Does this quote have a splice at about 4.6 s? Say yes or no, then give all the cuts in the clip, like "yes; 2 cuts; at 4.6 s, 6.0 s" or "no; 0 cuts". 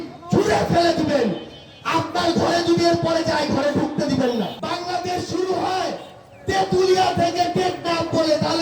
yes; 1 cut; at 4.6 s